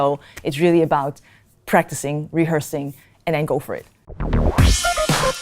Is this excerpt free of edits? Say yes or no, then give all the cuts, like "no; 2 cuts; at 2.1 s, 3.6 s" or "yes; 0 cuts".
no; 1 cut; at 4.1 s